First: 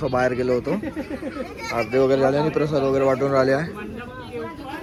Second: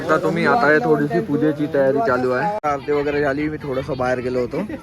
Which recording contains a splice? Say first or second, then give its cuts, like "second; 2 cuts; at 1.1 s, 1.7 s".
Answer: second; 1 cut; at 2.6 s